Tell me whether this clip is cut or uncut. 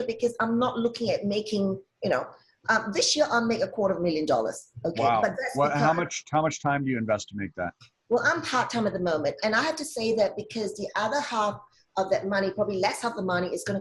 uncut